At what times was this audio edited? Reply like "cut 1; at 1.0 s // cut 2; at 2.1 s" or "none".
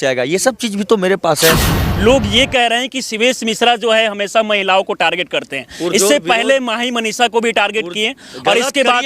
cut 1; at 1.8 s

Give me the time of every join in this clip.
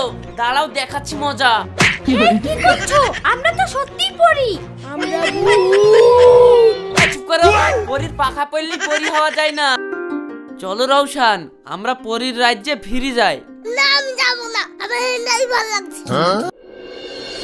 cut 1; at 9.8 s // cut 2; at 16.5 s

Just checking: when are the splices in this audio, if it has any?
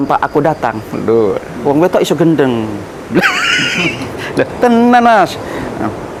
none

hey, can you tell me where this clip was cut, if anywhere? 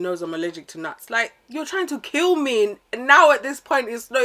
cut 1; at 1.0 s

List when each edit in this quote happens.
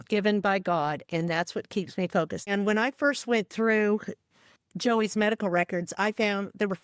cut 1; at 2.5 s

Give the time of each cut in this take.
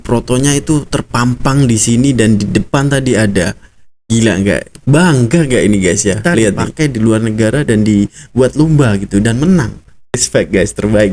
cut 1; at 6.7 s // cut 2; at 10.2 s

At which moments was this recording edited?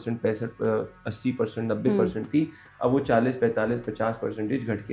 none

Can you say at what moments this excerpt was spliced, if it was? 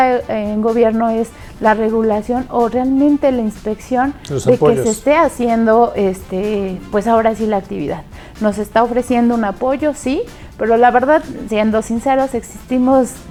none

